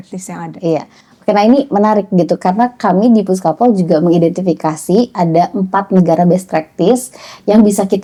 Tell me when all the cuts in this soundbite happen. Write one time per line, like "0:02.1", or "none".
none

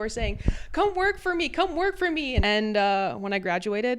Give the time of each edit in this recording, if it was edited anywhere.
0:02.4

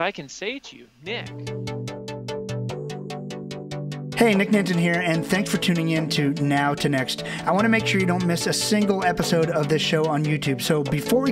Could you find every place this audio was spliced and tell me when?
0:01.3

